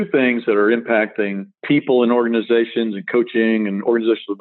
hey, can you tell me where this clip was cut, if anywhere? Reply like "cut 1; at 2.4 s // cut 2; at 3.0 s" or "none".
cut 1; at 1.5 s